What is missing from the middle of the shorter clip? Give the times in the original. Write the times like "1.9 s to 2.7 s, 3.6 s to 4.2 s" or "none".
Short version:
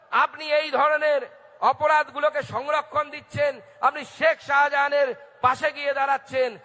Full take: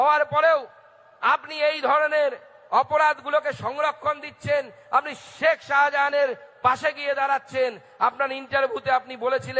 5.2 s to 5.3 s